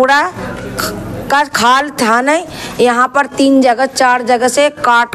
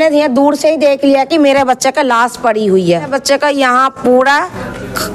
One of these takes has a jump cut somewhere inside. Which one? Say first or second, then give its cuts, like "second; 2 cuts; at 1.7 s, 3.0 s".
second; 1 cut; at 3.1 s